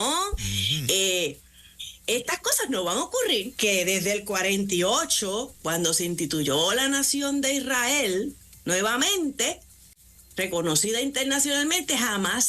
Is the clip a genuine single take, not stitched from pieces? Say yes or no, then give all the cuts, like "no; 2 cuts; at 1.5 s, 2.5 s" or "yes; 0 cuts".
no; 1 cut; at 3.5 s